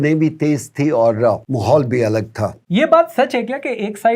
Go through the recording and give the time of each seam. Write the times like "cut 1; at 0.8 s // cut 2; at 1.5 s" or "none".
cut 1; at 1.5 s // cut 2; at 2.6 s